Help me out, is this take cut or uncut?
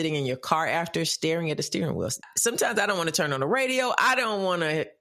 cut